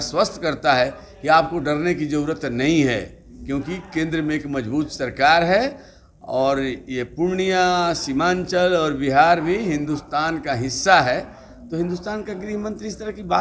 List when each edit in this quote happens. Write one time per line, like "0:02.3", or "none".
none